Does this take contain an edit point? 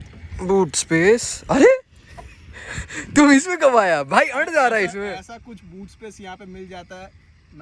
no; 0 cuts

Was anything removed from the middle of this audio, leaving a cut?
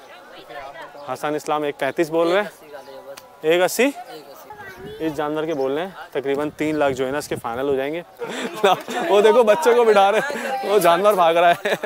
yes; 2 cuts; at 4.6 s, 8.3 s

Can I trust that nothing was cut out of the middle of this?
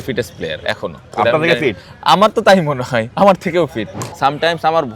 no; 2 cuts; at 1.1 s, 4.0 s

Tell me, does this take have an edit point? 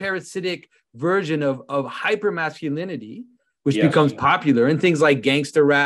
no; 0 cuts

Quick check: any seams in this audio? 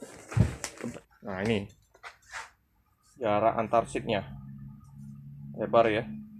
yes; 1 cut; at 1.0 s

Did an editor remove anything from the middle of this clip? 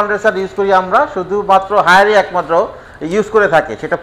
no; 0 cuts

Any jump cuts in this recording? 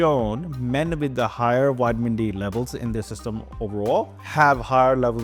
no; 0 cuts

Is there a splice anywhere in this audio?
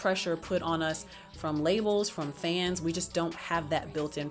no; 0 cuts

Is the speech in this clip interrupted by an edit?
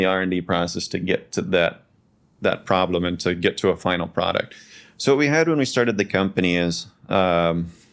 no; 0 cuts

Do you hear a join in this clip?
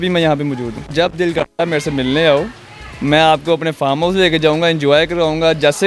yes; 1 cut; at 0.9 s

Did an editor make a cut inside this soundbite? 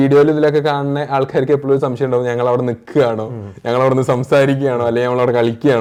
no; 0 cuts

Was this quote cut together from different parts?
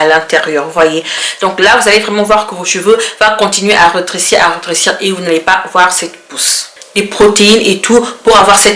yes; 2 cuts; at 1.2 s, 6.9 s

